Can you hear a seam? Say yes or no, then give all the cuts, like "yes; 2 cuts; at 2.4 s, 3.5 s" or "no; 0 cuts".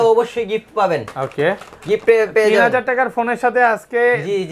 no; 0 cuts